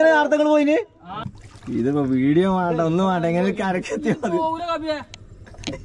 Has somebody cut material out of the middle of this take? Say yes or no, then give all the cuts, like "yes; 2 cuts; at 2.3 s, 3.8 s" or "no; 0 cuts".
yes; 1 cut; at 1.2 s